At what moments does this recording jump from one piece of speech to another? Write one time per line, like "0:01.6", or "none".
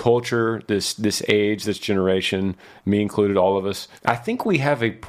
0:03.8